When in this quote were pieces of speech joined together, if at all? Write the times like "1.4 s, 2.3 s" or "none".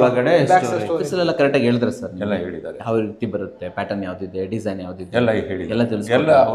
0.9 s